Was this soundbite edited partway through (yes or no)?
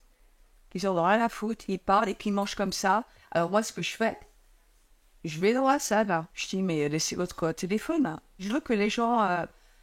yes